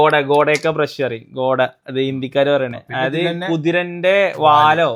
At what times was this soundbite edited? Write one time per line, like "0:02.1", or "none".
none